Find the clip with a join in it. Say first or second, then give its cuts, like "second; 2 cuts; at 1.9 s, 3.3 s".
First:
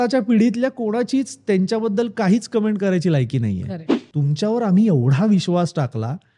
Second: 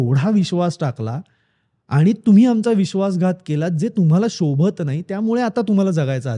first; 1 cut; at 4.0 s